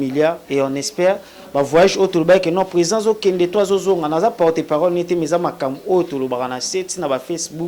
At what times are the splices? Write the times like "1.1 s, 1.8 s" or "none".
none

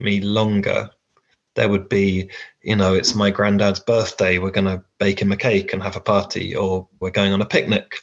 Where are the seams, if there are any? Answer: none

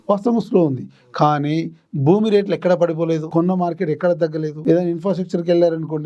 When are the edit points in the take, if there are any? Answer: 3.2 s, 4.5 s

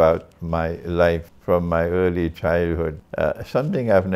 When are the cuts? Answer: 1.3 s, 3.0 s

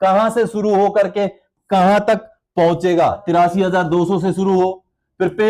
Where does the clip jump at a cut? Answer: 3.2 s

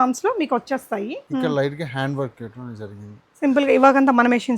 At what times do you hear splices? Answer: 1.2 s

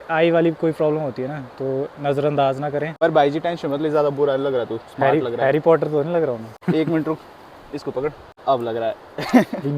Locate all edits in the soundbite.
2.9 s, 6.5 s, 8.3 s

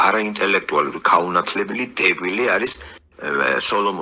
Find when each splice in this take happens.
none

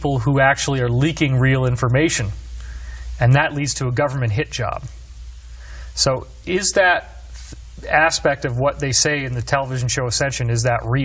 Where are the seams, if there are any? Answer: 3.2 s

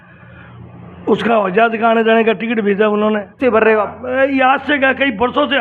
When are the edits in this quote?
3.3 s

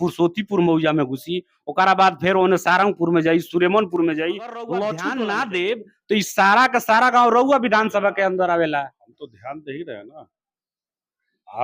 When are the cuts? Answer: 5.1 s

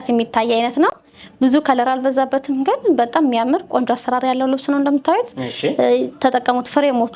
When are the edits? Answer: none

